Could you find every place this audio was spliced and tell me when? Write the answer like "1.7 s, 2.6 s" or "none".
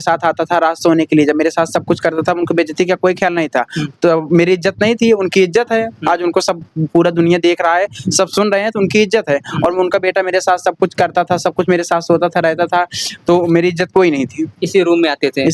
none